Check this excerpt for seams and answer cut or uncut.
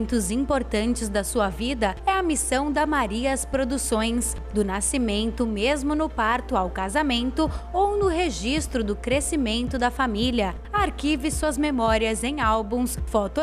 uncut